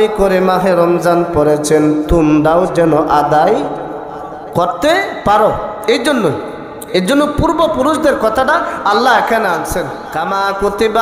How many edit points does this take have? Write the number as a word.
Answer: one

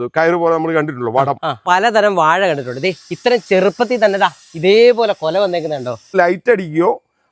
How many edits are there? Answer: two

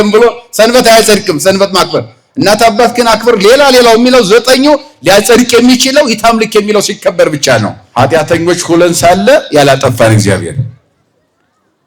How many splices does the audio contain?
one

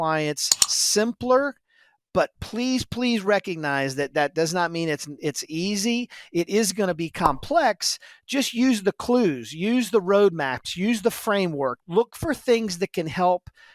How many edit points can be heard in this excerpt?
one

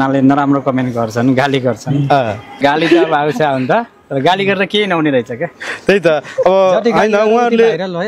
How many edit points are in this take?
one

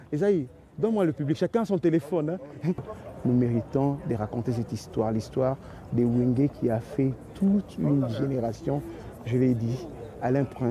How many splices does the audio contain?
one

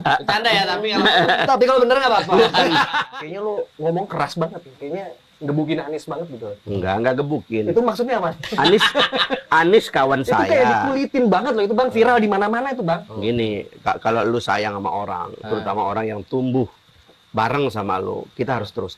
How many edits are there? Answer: one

